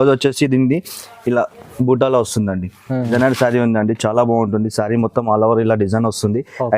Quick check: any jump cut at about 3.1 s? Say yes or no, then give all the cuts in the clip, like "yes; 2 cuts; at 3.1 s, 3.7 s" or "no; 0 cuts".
yes; 1 cut; at 3.1 s